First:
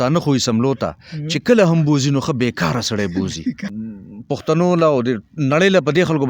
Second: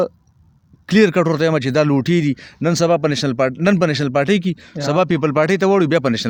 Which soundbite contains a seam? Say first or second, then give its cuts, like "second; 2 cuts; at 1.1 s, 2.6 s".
first; 1 cut; at 3.7 s